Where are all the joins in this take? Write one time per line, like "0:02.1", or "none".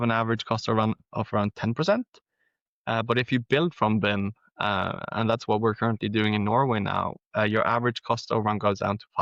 none